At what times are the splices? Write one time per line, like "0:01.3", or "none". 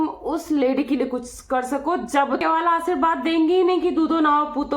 0:02.4